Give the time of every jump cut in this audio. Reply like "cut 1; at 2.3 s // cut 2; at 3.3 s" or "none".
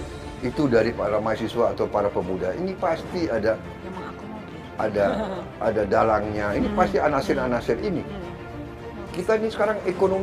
cut 1; at 8.6 s